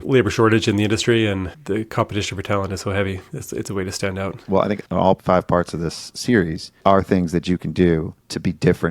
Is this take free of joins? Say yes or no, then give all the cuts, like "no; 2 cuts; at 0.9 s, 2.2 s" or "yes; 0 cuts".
no; 2 cuts; at 1.6 s, 4.4 s